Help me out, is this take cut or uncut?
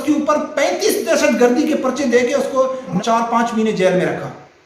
cut